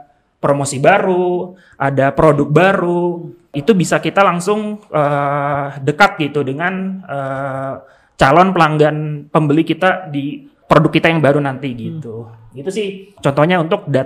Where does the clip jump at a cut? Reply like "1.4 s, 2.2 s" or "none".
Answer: 3.6 s, 10.5 s, 13.1 s